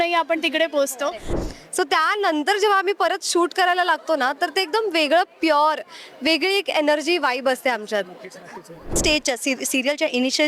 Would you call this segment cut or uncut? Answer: cut